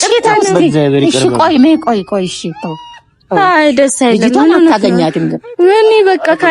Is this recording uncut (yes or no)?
yes